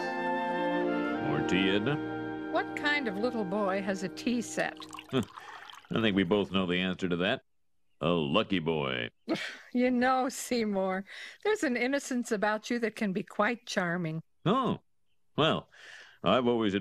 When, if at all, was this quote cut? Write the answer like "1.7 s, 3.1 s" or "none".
none